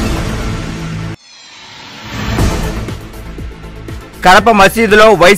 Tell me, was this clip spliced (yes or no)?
yes